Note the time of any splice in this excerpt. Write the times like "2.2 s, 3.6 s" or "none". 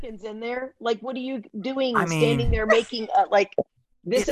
none